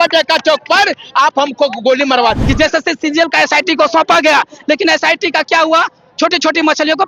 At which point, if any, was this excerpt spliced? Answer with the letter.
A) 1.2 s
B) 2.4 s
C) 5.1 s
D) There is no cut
B